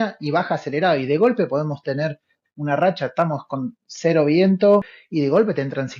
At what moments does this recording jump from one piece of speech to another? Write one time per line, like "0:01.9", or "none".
0:04.9